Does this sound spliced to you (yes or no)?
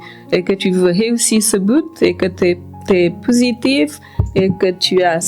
no